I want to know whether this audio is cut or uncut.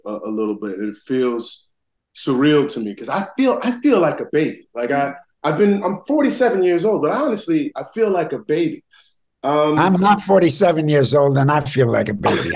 uncut